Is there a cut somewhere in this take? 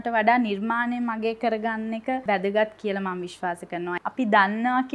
yes; 2 cuts; at 2.2 s, 4.0 s

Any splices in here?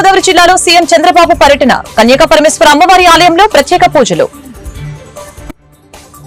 no; 0 cuts

